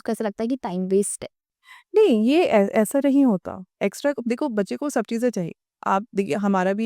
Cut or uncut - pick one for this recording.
uncut